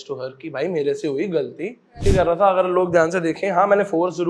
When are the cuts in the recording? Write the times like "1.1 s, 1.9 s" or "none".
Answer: 2.0 s